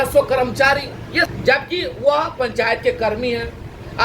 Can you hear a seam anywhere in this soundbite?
yes; 1 cut; at 1.3 s

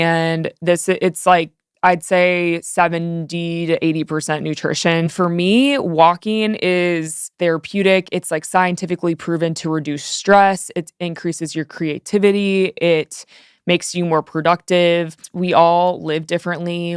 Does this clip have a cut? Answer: yes; 3 cuts; at 5.1 s, 7.2 s, 15.3 s

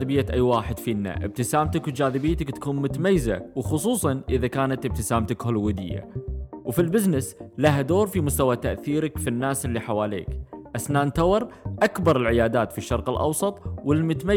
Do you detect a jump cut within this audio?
no; 0 cuts

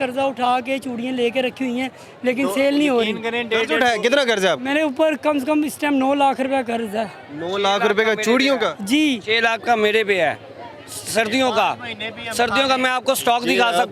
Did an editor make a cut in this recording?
no; 0 cuts

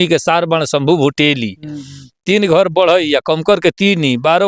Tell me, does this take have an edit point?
no; 0 cuts

